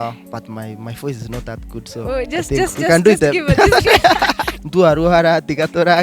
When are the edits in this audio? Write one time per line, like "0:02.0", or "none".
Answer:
0:04.5